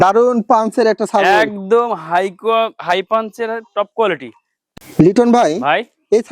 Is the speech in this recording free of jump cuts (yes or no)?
no